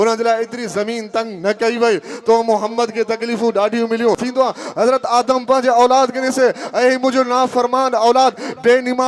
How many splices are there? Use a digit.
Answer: 1